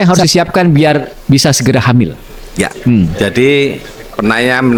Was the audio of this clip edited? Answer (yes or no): no